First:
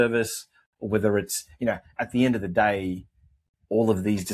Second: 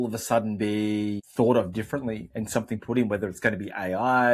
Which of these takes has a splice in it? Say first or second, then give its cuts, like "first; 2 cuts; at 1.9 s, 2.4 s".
second; 1 cut; at 1.2 s